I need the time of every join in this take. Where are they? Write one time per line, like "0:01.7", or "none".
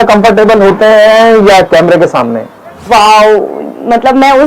0:02.8